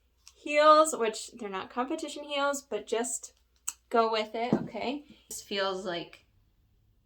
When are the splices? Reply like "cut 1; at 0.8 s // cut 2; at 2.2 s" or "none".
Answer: cut 1; at 5.4 s

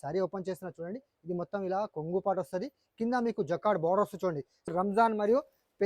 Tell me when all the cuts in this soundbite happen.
cut 1; at 4.7 s

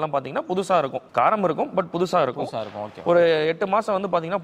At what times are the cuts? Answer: cut 1; at 1.0 s

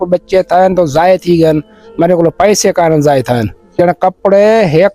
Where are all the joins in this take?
cut 1; at 3.8 s

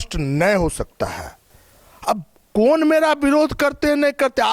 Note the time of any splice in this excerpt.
none

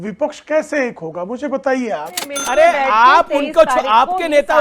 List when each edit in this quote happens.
cut 1; at 2.3 s

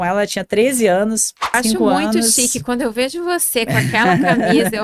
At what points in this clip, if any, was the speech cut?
cut 1; at 1.5 s

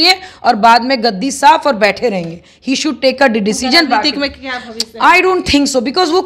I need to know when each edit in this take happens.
none

